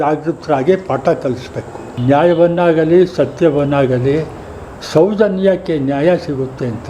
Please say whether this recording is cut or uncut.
uncut